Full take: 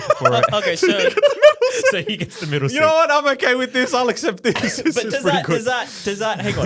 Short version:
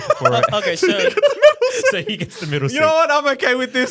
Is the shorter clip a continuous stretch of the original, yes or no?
yes